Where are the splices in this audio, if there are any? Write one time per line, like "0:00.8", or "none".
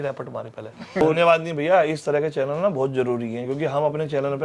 0:01.0